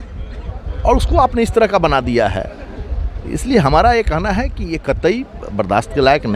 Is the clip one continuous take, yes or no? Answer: yes